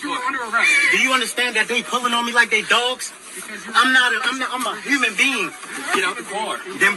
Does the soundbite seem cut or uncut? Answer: uncut